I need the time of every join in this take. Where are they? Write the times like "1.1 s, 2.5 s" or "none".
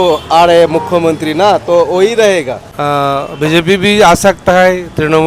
2.7 s

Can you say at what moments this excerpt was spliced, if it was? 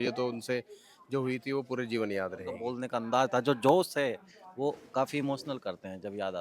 2.7 s

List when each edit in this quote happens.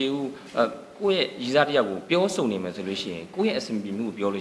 none

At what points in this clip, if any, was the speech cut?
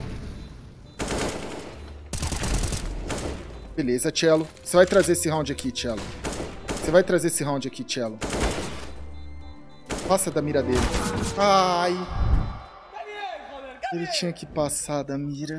none

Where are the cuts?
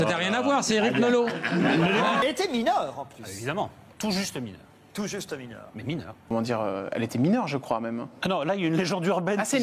2.2 s, 6.3 s

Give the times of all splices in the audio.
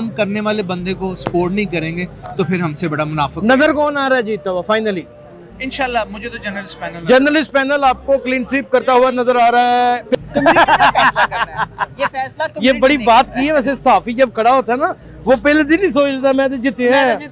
10.1 s

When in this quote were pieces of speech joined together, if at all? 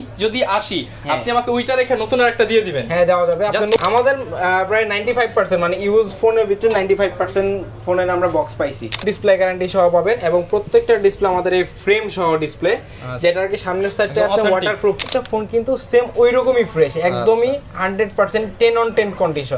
3.8 s, 9.0 s, 15.0 s

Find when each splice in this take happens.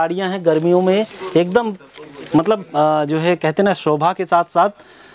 none

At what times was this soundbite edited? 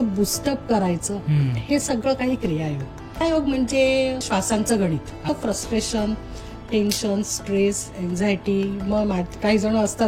3.2 s, 4.3 s, 5.2 s

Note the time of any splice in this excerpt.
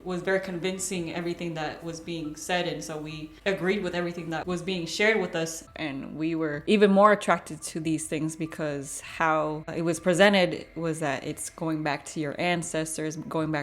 3.3 s, 5.7 s

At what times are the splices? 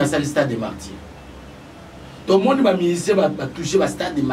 none

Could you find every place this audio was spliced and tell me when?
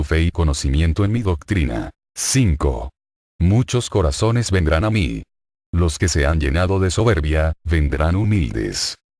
1.6 s

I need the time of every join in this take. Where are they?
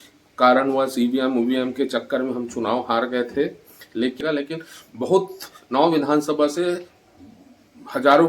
4.2 s

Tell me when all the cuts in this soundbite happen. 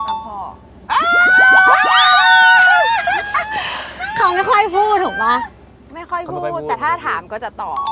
none

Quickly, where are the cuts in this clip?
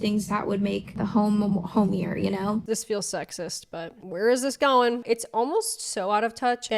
0.9 s, 2.6 s, 5.0 s

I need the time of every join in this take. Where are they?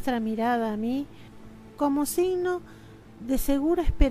none

